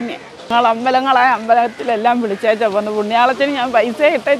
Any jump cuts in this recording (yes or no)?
no